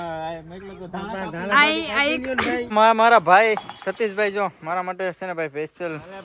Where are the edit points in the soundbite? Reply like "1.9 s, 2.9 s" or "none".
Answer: 2.7 s